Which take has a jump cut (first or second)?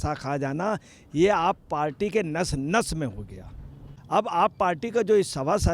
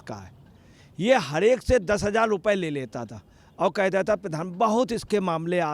first